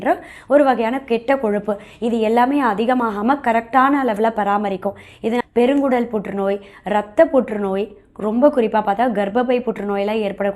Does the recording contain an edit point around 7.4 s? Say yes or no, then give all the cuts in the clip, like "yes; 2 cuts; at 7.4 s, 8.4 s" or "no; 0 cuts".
no; 1 cut; at 5.4 s